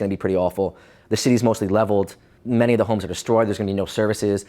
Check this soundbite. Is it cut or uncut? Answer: cut